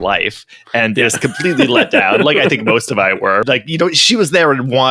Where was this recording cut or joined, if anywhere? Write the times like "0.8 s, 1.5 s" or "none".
3.4 s